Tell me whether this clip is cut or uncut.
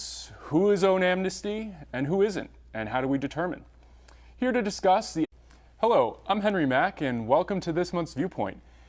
uncut